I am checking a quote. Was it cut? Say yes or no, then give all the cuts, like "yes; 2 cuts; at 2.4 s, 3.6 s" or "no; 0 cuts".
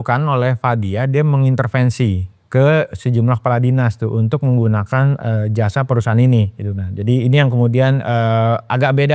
no; 0 cuts